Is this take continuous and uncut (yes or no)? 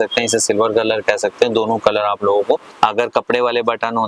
no